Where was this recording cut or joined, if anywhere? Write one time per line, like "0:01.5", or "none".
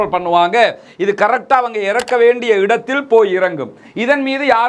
none